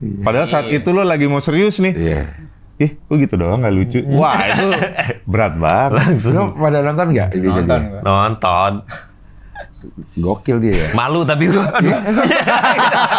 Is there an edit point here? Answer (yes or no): no